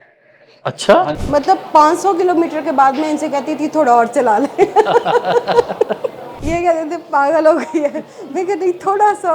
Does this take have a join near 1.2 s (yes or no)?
yes